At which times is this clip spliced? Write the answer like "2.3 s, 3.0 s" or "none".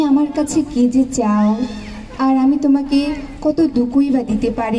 none